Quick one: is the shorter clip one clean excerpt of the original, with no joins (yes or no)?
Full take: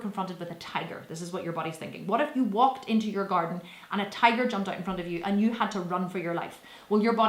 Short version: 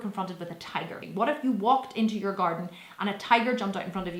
no